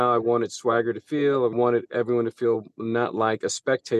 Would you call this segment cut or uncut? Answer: cut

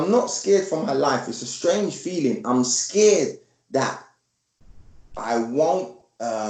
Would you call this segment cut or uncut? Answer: uncut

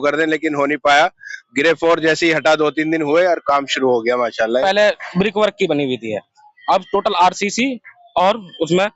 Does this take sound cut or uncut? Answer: cut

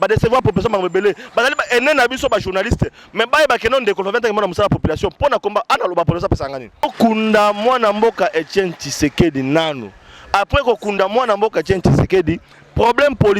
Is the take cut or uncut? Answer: cut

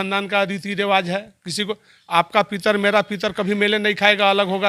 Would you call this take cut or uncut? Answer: uncut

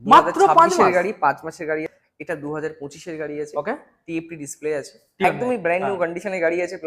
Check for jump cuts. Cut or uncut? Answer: cut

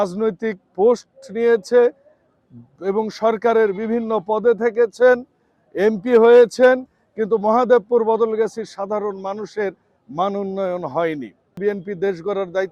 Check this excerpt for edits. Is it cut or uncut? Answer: cut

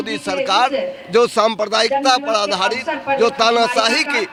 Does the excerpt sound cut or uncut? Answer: uncut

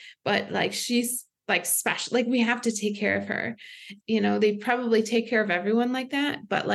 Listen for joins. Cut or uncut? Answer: cut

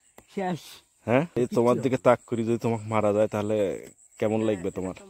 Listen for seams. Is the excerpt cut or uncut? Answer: cut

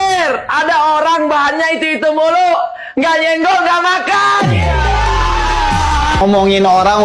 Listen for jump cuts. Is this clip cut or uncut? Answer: uncut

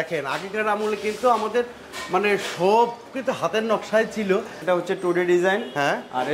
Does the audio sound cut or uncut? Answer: cut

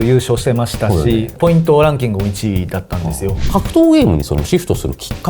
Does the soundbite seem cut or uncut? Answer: cut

